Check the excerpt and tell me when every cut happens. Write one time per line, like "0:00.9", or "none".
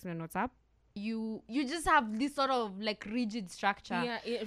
0:01.0